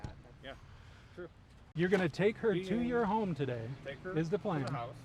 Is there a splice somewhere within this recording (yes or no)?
yes